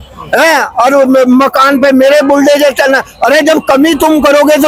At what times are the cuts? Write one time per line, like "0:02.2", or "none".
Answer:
none